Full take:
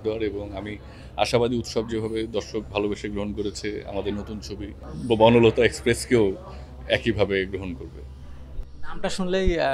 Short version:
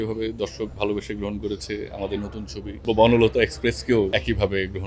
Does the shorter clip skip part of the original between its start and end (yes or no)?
yes